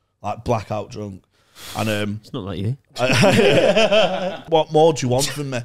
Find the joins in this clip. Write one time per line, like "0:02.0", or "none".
0:04.4